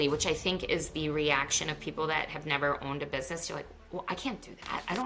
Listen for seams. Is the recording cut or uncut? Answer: uncut